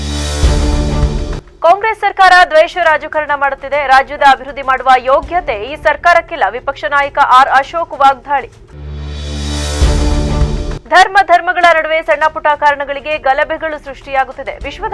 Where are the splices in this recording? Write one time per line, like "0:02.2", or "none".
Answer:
0:01.4